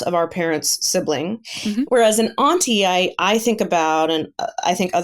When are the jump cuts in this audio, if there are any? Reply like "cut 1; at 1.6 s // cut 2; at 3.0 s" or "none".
cut 1; at 1.6 s